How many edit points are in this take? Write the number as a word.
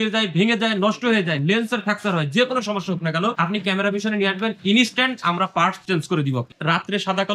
two